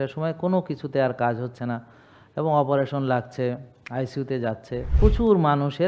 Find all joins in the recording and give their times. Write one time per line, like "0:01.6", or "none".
0:05.0